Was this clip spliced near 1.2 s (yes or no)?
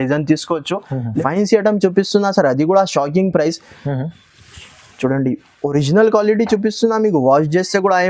yes